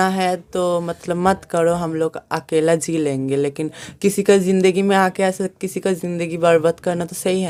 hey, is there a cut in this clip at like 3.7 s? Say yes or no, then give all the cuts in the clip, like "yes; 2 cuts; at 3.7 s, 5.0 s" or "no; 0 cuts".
no; 0 cuts